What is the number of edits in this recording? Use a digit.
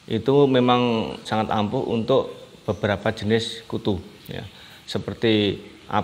1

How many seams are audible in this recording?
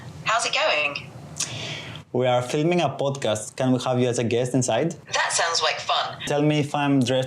1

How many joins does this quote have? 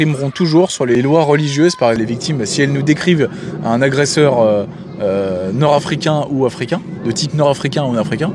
1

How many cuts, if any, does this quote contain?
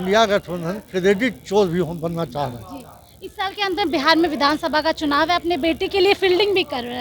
0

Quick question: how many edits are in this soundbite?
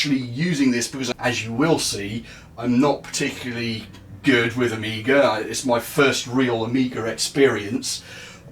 1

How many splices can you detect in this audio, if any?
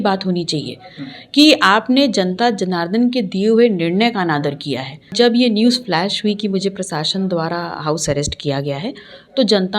1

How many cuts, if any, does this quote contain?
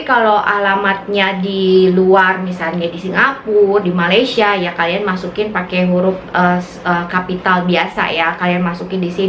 0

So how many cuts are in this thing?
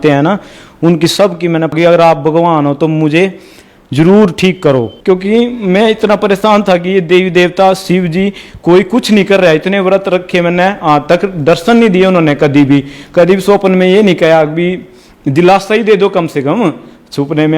2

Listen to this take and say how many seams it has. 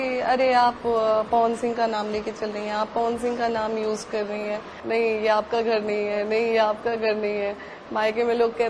1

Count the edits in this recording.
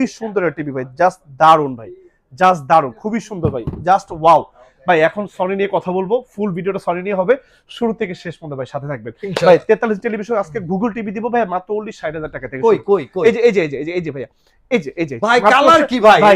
0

